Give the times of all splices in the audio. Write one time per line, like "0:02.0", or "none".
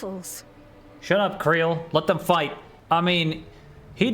0:02.7